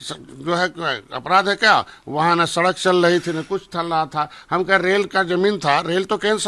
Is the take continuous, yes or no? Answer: yes